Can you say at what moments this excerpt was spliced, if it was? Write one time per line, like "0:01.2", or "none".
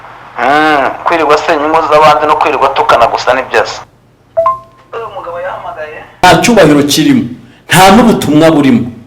0:06.2